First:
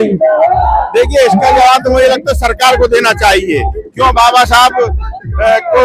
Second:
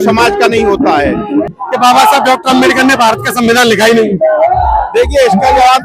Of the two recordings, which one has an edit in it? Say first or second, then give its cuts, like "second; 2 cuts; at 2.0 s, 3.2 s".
second; 1 cut; at 1.5 s